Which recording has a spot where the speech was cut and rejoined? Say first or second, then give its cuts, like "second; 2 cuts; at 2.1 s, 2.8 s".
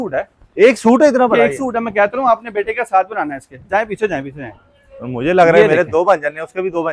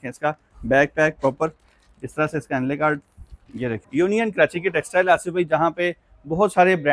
second; 1 cut; at 3.8 s